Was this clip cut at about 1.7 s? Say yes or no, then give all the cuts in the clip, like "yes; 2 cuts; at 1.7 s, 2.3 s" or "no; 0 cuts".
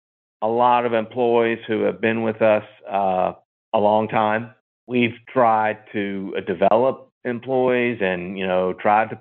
no; 1 cut; at 4.8 s